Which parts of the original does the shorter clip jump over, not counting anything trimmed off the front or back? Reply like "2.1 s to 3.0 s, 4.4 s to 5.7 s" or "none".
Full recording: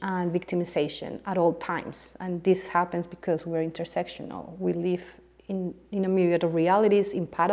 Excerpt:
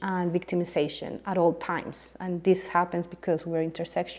none